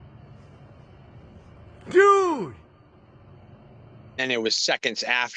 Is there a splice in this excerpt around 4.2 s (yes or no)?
yes